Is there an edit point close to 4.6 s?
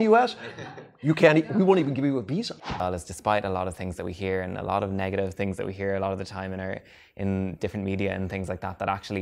no; 1 cut; at 2.5 s

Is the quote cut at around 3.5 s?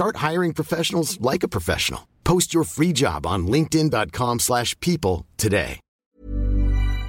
no; 1 cut; at 6.0 s

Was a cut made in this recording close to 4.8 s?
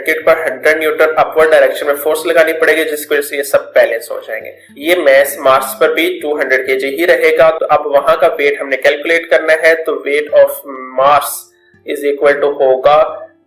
yes; 1 cut; at 4.8 s

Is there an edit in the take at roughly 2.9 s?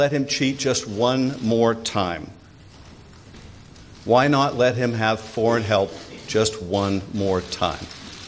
no; 0 cuts

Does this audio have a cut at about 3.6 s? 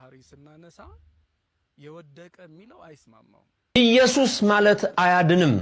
yes; 1 cut; at 3.6 s

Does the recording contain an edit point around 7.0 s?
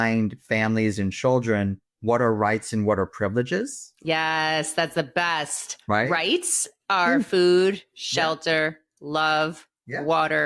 no; 0 cuts

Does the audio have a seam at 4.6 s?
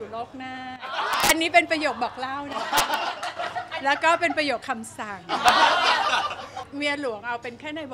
no; 2 cuts; at 1.3 s, 6.6 s

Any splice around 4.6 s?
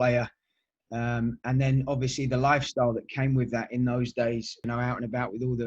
yes; 1 cut; at 4.6 s

